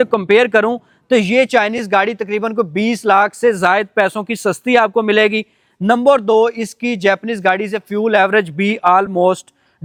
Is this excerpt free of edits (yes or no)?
yes